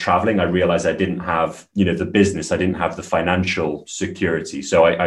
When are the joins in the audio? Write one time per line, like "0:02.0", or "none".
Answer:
0:03.9